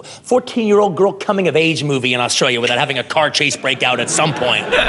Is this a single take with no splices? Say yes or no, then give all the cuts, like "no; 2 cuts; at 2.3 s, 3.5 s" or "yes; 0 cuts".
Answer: yes; 0 cuts